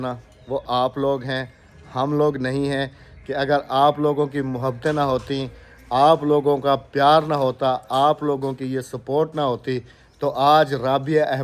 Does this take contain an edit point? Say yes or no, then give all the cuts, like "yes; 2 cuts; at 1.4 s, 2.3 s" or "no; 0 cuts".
no; 0 cuts